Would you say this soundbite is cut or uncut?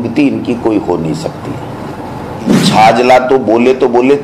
cut